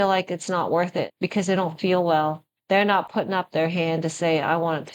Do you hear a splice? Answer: yes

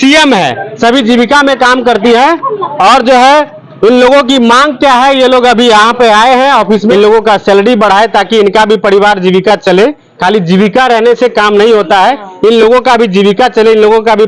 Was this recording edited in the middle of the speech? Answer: yes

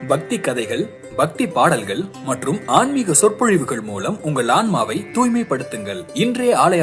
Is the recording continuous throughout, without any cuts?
yes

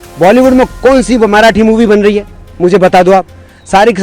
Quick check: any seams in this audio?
no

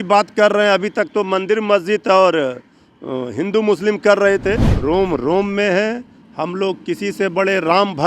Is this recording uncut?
no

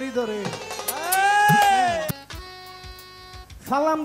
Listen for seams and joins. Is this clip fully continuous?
no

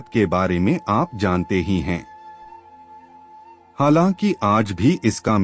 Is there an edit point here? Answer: no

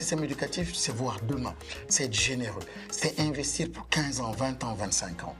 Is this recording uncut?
yes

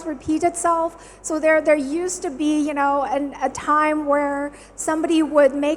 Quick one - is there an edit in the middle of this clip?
no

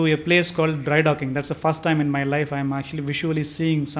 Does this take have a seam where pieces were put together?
no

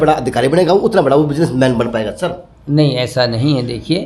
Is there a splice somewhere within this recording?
no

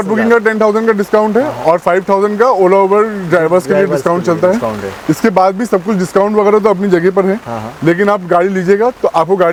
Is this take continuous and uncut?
yes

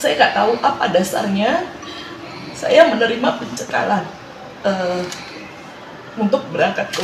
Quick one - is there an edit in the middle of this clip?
no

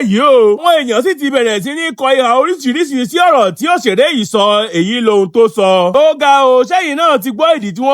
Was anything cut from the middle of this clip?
yes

